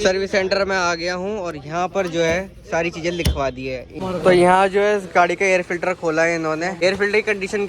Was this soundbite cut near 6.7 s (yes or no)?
yes